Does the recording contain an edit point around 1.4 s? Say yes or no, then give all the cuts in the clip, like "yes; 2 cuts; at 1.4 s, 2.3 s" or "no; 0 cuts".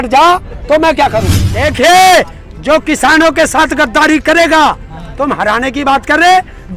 yes; 1 cut; at 1.4 s